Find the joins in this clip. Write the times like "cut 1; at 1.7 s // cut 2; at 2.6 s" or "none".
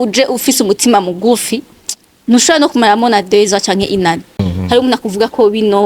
cut 1; at 4.5 s